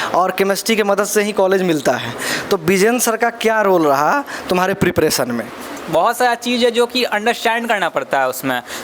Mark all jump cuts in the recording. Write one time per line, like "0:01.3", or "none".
0:05.7